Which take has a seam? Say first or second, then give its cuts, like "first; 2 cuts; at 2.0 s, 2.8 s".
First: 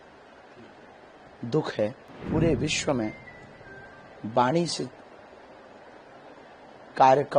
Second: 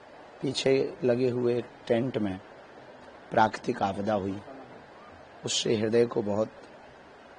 first; 1 cut; at 2.1 s